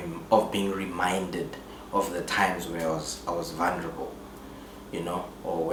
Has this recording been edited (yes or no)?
no